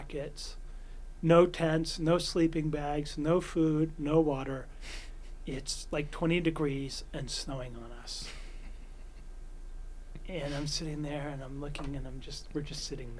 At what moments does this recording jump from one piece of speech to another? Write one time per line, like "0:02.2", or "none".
none